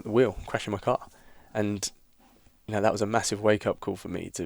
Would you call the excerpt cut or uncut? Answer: uncut